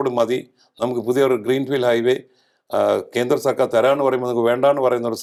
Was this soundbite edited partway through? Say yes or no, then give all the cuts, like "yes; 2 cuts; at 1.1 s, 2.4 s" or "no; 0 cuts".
no; 0 cuts